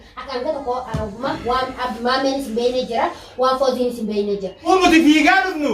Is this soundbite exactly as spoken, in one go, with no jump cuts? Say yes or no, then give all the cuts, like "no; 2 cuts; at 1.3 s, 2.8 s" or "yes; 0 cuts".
no; 1 cut; at 4.7 s